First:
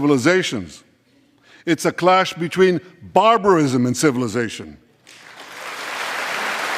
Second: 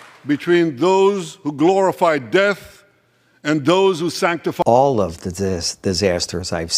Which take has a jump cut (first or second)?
second